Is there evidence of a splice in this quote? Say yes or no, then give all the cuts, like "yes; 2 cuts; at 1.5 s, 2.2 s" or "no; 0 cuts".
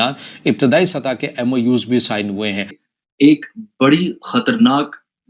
yes; 1 cut; at 2.9 s